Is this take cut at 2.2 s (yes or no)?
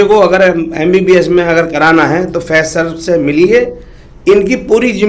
no